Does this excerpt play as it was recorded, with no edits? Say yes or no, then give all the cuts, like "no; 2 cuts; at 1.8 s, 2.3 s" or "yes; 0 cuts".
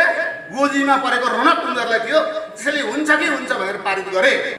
yes; 0 cuts